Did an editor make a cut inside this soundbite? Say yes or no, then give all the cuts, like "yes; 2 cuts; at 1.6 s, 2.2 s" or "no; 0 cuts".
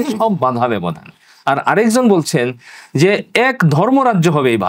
no; 0 cuts